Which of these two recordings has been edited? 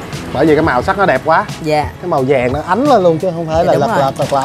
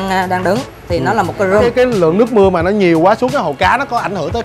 second; 1 cut; at 1.7 s

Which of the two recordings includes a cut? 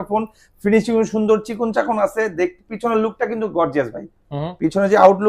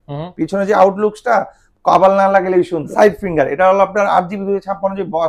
second; 1 cut; at 2.9 s

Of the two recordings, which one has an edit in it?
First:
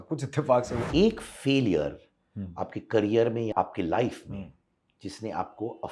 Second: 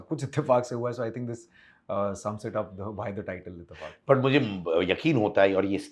first; 2 cuts; at 0.8 s, 3.5 s

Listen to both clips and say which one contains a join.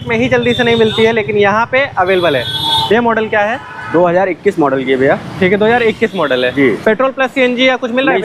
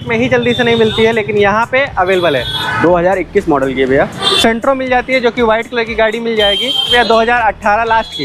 second; 3 cuts; at 2.6 s, 4.2 s, 6.9 s

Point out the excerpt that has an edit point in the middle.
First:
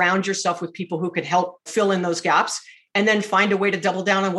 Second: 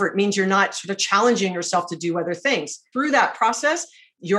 second; 1 cut; at 2.9 s

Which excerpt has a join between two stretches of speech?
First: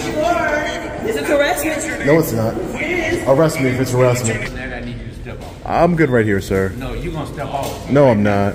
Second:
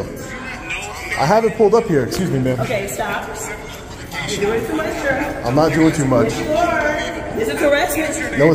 first; 1 cut; at 4.6 s

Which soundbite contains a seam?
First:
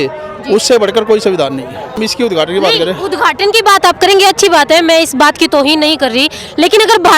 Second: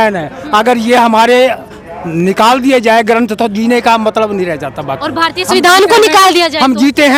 first; 1 cut; at 2.0 s

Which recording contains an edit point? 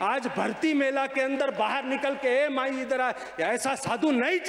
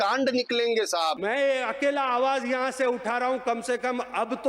second; 1 cut; at 1.2 s

